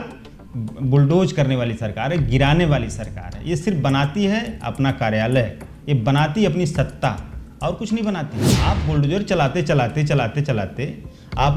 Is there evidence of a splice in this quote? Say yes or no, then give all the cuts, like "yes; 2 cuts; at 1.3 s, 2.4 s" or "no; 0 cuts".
yes; 1 cut; at 8.5 s